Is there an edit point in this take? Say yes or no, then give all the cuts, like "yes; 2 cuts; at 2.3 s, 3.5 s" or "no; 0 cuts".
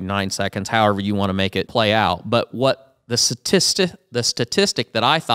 yes; 1 cut; at 1.7 s